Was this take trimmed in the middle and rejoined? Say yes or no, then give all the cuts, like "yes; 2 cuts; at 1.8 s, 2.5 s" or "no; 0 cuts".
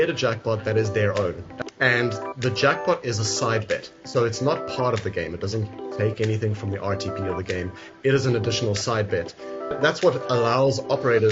yes; 2 cuts; at 1.5 s, 9.8 s